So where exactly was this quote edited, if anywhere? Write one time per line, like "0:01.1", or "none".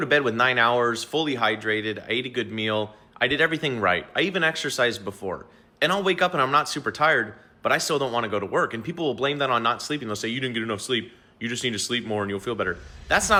none